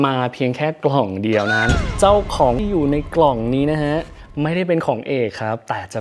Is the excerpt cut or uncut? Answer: cut